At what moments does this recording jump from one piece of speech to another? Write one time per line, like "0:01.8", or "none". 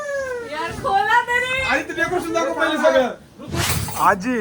0:03.5